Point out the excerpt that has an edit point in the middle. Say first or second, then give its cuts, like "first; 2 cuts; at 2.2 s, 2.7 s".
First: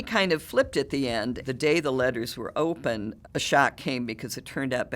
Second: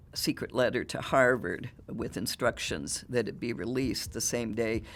first; 2 cuts; at 1.4 s, 3.1 s